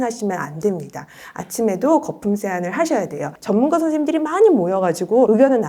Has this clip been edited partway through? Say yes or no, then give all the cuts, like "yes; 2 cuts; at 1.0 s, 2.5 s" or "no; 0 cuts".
yes; 1 cut; at 3.3 s